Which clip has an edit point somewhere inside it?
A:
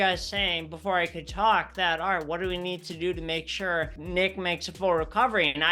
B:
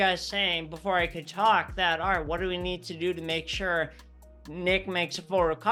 A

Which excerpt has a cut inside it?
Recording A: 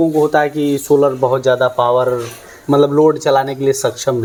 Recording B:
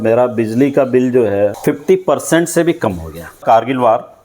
B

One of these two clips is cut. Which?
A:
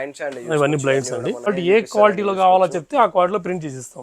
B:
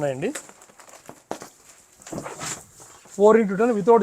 A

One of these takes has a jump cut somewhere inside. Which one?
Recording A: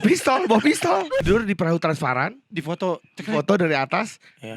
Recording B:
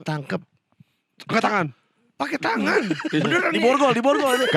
A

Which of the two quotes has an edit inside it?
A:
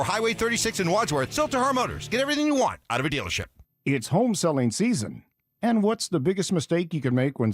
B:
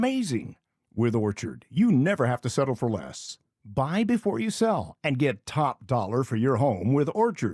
A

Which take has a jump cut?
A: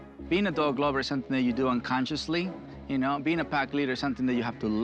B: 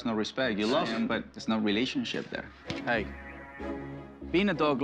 B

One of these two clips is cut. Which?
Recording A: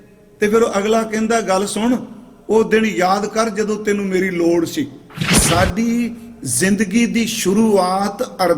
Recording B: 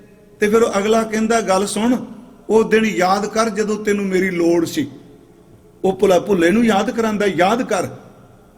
A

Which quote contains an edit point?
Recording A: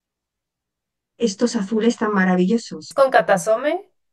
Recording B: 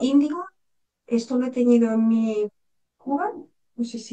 A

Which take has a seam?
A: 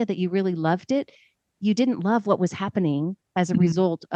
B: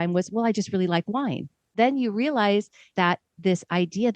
B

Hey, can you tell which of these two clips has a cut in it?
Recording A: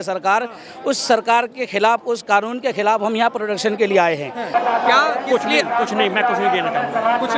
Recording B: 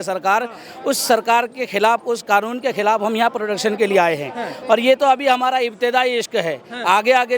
A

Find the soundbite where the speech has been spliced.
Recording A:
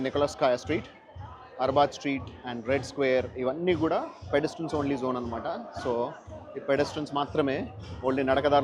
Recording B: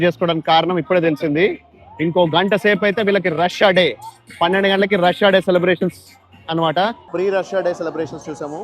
B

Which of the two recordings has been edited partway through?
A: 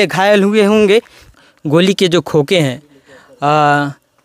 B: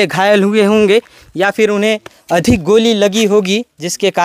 A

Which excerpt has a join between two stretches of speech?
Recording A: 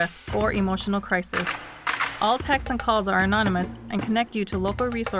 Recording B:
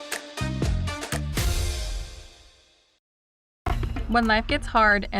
B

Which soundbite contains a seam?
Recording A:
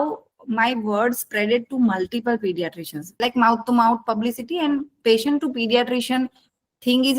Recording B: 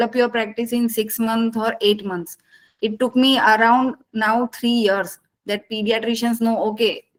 A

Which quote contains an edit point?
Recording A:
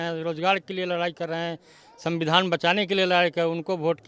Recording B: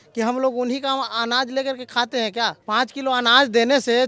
B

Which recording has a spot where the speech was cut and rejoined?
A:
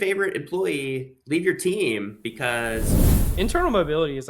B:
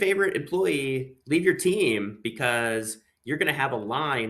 A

